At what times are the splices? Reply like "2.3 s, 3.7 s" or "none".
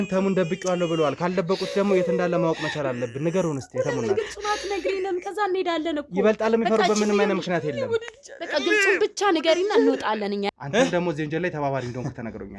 10.5 s